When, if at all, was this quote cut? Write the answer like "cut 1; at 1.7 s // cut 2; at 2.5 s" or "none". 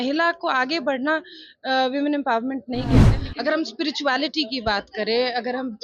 cut 1; at 3.2 s